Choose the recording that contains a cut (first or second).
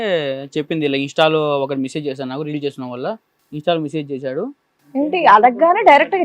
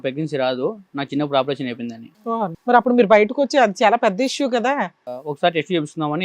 second